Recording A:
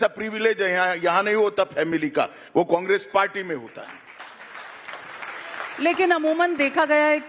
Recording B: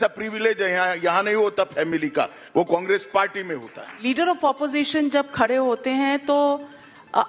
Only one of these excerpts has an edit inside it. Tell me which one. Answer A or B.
B